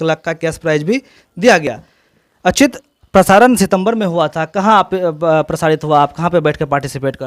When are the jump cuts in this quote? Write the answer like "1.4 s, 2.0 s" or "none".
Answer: none